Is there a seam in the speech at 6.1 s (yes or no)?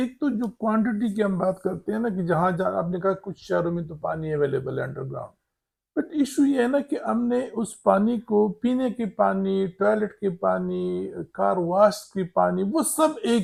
no